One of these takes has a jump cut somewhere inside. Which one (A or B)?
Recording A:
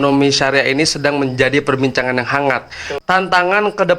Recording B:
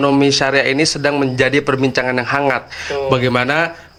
A